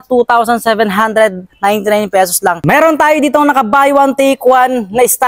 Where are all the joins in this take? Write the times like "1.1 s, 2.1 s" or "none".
2.6 s